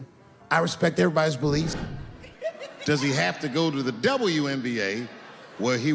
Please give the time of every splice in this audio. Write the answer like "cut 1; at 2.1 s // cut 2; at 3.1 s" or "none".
cut 1; at 1.8 s